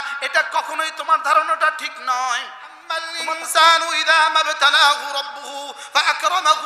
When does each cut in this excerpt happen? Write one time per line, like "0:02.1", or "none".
0:03.1